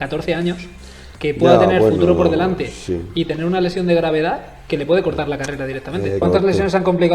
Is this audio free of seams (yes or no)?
no